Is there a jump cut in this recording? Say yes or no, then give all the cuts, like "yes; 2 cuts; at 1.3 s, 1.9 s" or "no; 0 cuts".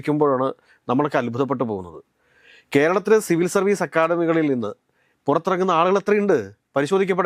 no; 0 cuts